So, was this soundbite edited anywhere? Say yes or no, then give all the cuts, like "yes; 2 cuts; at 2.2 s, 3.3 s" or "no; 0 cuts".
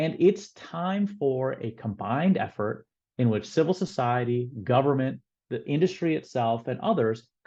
no; 0 cuts